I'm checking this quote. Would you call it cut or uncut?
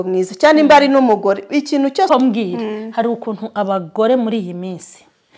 cut